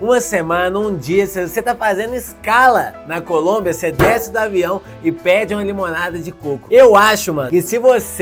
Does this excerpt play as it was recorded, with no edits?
yes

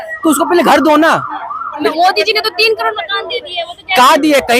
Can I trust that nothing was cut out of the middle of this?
no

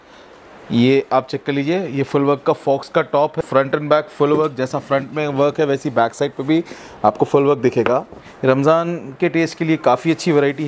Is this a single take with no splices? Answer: no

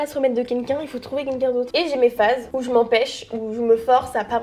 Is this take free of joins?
no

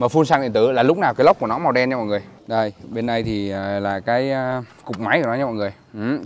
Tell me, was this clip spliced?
yes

